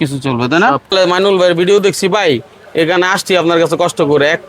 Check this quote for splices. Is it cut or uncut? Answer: cut